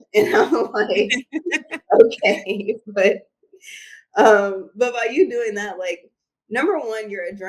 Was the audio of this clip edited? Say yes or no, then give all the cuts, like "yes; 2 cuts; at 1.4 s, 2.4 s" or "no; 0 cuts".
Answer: no; 0 cuts